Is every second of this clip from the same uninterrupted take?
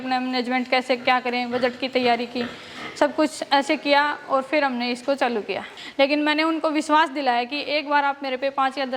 no; 1 cut; at 5.7 s

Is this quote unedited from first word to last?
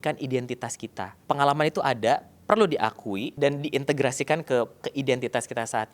no; 3 cuts; at 1.1 s, 3.3 s, 4.8 s

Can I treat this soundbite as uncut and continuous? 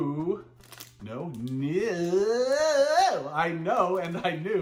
yes; 0 cuts

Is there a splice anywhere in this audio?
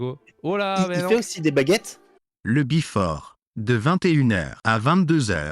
yes; 1 cut; at 2.3 s

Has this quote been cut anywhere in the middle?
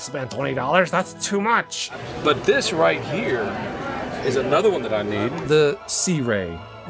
no; 0 cuts

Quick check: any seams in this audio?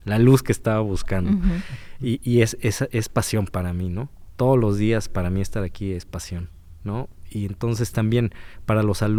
no; 0 cuts

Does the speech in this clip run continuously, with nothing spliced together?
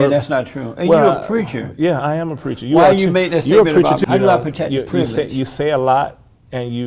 no; 1 cut; at 4.0 s

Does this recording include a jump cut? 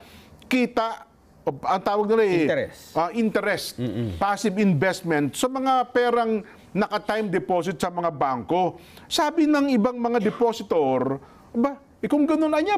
no; 0 cuts

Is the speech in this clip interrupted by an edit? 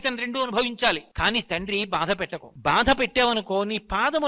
yes; 2 cuts; at 1.1 s, 2.4 s

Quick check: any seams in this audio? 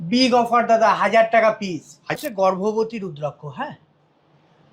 yes; 1 cut; at 2.1 s

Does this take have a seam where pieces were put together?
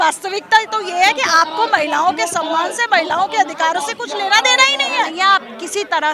yes; 1 cut; at 5.1 s

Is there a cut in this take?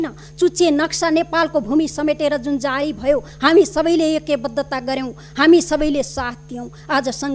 no; 0 cuts

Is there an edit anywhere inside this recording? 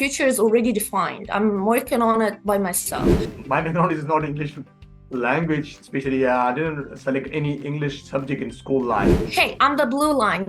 yes; 2 cuts; at 3.3 s, 9.2 s

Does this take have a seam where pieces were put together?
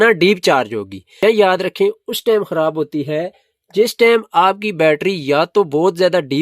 yes; 1 cut; at 1.2 s

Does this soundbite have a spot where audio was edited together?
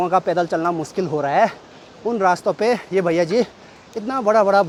no; 0 cuts

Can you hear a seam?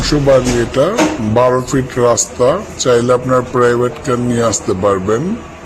yes; 1 cut; at 3.5 s

